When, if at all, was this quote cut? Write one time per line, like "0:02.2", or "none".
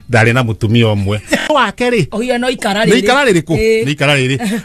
0:01.5